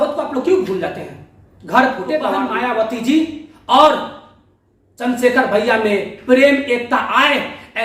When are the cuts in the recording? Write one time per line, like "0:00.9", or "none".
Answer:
0:02.5